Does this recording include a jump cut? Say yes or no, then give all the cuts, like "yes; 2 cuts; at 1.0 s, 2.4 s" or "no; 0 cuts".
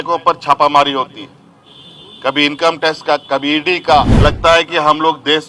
yes; 1 cut; at 4.1 s